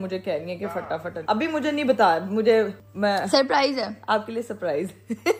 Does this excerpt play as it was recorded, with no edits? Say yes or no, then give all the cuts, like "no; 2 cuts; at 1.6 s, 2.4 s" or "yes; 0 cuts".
yes; 0 cuts